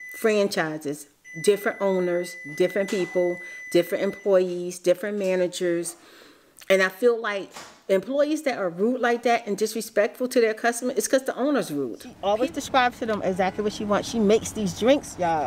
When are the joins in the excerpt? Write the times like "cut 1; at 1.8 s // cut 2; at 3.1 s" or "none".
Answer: cut 1; at 12.1 s